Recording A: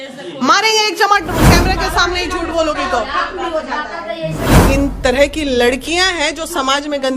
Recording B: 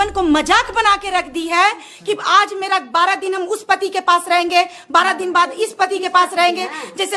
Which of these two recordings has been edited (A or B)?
A